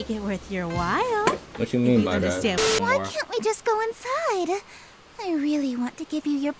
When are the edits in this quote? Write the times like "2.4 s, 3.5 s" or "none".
2.7 s